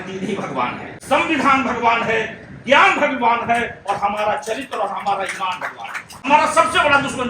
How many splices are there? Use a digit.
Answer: 2